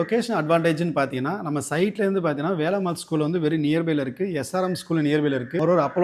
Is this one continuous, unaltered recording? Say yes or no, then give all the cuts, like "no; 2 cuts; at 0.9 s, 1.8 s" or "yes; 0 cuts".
yes; 0 cuts